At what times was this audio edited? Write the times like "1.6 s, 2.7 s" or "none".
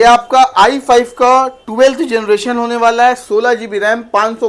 none